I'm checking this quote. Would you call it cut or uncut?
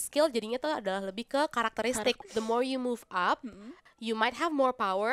cut